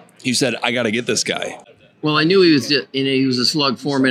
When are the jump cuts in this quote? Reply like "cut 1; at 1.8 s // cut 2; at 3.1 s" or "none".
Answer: cut 1; at 2.0 s